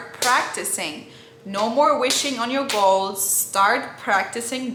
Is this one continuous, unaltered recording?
yes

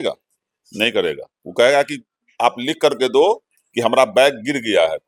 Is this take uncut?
yes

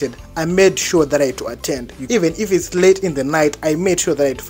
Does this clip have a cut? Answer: yes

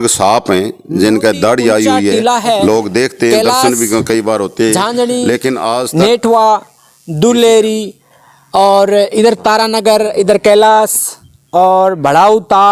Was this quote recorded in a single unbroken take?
no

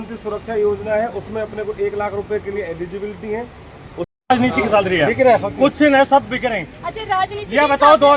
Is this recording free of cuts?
no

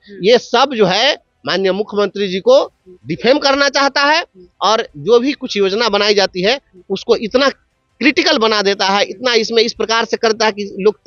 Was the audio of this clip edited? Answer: no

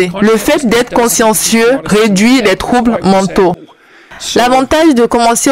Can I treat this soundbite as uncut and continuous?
no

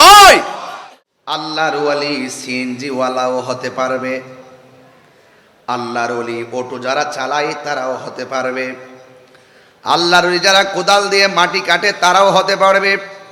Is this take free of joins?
no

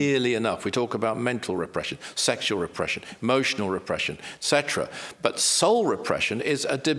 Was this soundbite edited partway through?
no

